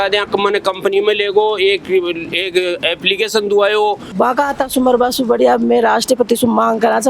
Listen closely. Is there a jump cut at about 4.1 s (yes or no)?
yes